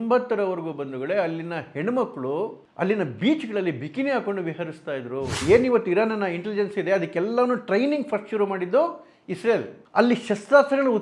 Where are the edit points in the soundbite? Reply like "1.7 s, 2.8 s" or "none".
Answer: 5.4 s